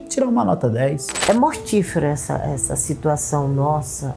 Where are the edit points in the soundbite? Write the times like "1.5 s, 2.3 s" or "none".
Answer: 1.1 s